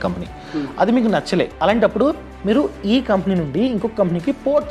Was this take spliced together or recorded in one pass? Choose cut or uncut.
cut